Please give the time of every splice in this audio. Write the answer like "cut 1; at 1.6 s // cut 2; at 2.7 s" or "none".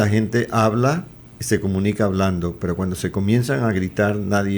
none